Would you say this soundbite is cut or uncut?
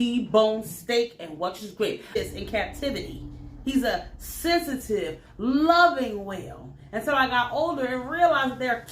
cut